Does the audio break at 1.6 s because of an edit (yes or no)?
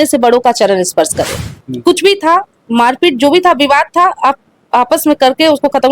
yes